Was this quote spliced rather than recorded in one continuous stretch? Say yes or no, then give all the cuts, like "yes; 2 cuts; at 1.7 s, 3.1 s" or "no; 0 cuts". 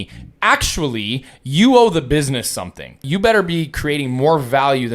yes; 1 cut; at 3.0 s